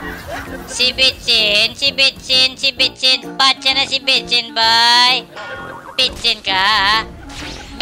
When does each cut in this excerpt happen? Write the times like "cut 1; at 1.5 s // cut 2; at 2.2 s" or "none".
none